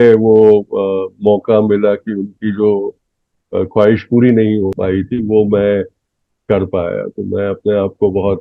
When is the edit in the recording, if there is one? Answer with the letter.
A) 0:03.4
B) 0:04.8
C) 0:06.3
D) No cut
B